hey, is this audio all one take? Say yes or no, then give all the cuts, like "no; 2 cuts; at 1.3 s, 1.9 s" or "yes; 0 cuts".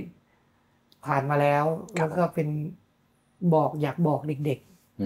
yes; 0 cuts